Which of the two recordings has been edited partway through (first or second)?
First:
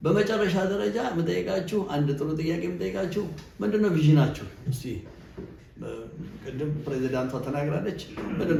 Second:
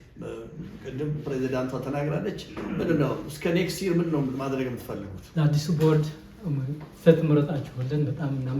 second